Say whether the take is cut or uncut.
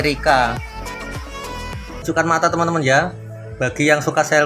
cut